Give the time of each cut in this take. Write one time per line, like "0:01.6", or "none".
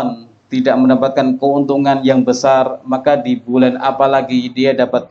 none